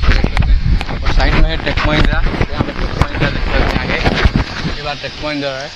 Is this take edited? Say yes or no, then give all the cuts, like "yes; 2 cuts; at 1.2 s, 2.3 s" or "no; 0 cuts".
no; 0 cuts